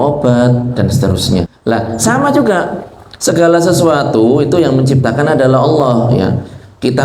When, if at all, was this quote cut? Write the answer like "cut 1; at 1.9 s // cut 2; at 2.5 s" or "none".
cut 1; at 1.4 s

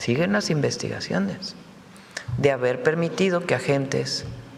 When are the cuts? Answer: none

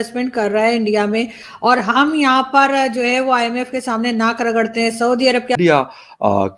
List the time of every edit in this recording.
cut 1; at 5.6 s

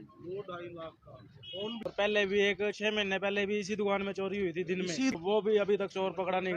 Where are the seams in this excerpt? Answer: cut 1; at 1.9 s // cut 2; at 5.1 s

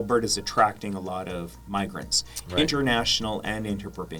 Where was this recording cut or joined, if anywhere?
none

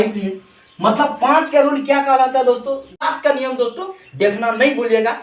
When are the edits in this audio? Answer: cut 1; at 3.0 s

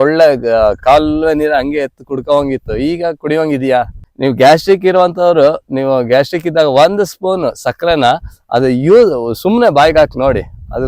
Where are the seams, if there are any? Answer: cut 1; at 4.0 s

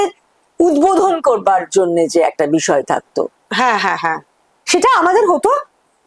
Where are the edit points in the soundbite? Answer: none

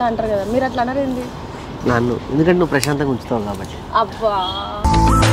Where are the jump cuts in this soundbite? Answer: none

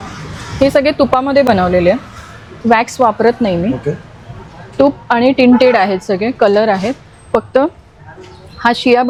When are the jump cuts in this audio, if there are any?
none

